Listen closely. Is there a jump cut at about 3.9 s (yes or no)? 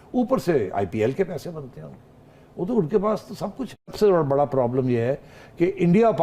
yes